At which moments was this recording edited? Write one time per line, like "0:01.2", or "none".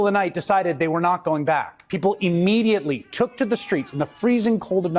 0:01.8